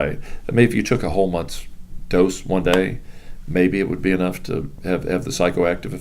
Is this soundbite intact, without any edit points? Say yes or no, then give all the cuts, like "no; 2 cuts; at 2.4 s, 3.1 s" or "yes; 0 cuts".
no; 1 cut; at 4.7 s